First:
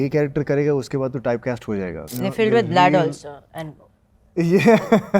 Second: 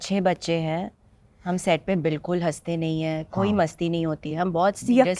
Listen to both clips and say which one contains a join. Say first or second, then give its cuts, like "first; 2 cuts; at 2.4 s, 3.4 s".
first; 1 cut; at 2.1 s